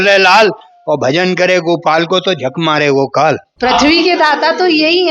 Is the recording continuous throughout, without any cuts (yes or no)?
no